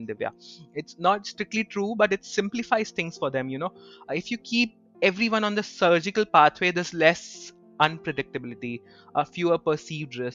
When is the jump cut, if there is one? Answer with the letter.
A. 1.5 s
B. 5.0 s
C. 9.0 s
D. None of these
D